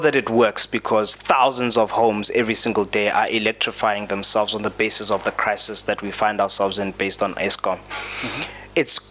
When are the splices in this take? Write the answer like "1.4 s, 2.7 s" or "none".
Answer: none